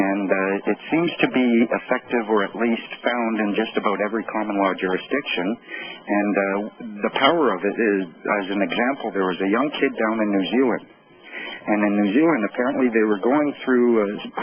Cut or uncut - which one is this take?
cut